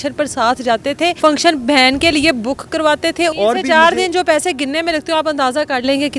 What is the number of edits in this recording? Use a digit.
2